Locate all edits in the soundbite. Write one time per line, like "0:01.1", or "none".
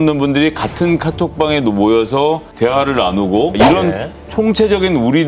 0:02.5
0:03.7